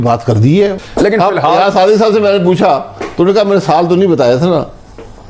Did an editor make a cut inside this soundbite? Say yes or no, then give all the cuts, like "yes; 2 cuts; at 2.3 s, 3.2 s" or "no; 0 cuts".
no; 0 cuts